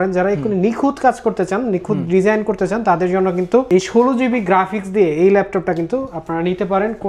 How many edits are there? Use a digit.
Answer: 0